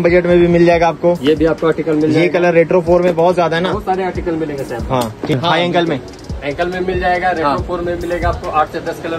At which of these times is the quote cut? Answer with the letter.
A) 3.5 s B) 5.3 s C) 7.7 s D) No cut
B